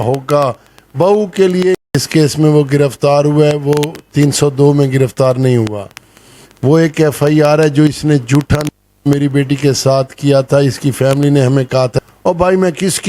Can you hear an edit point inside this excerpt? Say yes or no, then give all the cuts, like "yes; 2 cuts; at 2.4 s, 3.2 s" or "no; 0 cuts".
yes; 2 cuts; at 1.7 s, 11.9 s